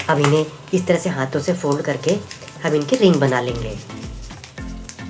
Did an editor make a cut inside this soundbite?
yes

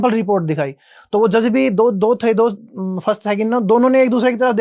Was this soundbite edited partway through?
no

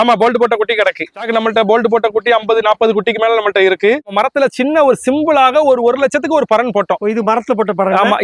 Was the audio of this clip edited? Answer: yes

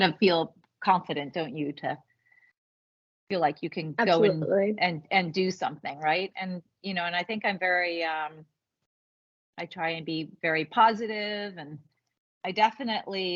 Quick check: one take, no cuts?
yes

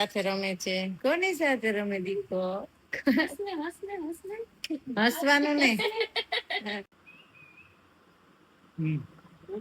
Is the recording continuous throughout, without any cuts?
no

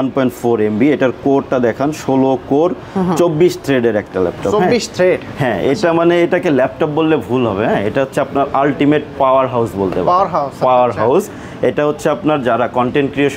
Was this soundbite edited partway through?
no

